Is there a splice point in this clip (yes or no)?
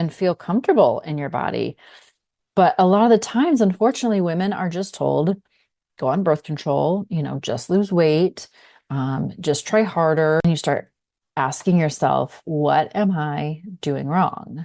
yes